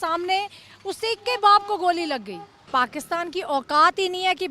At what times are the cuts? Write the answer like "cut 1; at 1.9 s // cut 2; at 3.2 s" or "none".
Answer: cut 1; at 2.6 s